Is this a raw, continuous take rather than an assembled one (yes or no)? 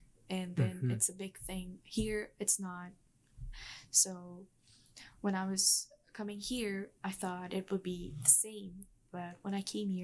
yes